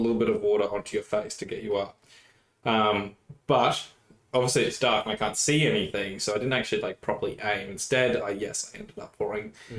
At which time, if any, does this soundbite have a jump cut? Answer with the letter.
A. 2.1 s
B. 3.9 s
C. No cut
C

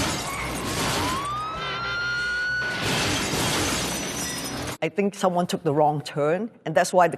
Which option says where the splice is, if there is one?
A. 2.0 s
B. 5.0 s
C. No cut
C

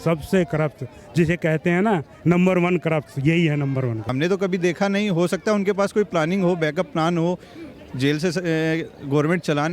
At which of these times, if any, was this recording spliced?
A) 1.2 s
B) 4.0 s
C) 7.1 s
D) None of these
B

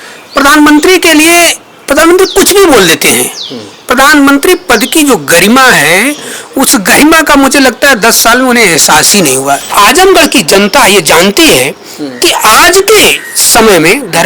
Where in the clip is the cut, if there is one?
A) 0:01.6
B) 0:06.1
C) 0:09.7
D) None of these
C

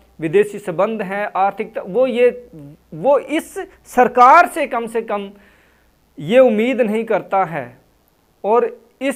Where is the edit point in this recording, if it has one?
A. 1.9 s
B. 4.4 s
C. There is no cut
C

